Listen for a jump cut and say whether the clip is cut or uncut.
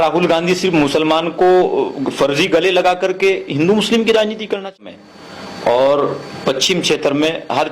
cut